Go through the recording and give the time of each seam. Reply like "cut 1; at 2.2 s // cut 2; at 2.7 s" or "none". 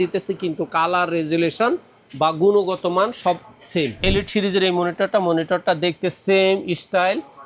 cut 1; at 4.0 s